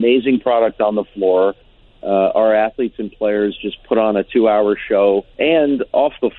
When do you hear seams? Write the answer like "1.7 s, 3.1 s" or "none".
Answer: 5.3 s